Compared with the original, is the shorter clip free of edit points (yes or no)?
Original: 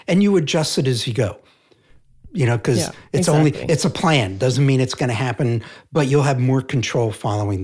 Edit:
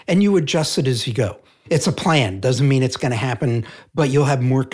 no